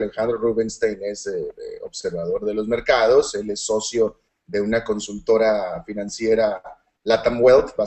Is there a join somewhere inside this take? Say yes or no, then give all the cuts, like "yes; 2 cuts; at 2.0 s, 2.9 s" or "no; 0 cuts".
no; 0 cuts